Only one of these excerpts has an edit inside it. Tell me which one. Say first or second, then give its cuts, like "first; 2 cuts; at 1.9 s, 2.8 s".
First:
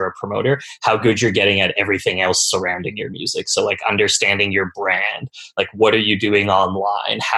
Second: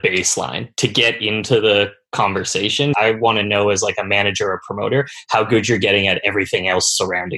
second; 1 cut; at 2.9 s